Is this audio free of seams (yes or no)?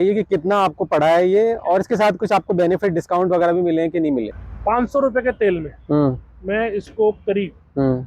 no